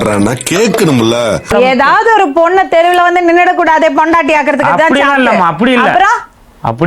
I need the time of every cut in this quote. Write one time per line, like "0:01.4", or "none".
0:01.5